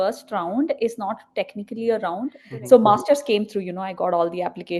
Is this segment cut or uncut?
cut